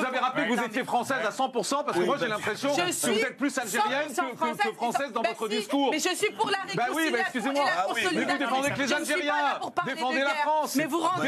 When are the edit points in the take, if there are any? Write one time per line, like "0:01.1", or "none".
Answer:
none